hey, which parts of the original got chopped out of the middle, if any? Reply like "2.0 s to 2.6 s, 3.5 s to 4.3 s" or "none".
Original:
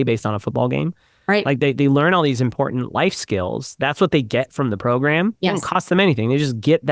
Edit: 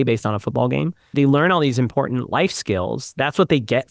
1.1 s to 1.7 s